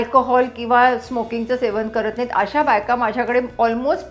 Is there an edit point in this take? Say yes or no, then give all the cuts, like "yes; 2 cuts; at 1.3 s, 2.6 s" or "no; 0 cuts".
no; 0 cuts